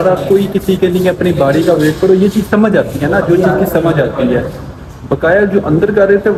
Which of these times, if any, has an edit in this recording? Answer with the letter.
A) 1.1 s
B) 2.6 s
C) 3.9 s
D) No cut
D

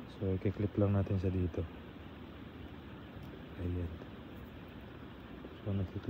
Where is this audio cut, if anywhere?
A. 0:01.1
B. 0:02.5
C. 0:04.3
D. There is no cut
D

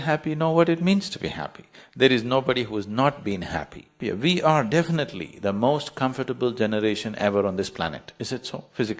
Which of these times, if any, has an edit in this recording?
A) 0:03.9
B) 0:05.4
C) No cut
A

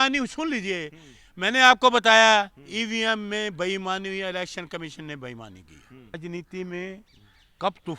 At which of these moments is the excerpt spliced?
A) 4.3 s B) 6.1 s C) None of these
B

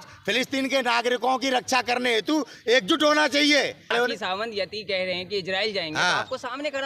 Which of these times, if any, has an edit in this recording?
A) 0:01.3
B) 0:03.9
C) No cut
B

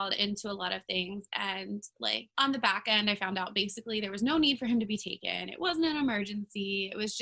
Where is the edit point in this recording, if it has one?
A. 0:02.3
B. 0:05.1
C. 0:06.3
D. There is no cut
A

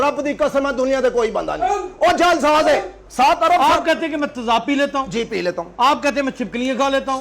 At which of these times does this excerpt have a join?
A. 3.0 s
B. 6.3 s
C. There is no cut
A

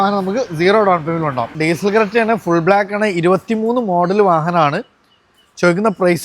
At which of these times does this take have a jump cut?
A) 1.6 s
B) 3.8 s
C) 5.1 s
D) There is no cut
A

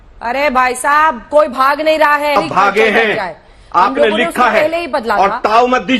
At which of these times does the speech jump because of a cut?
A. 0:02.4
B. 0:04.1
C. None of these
A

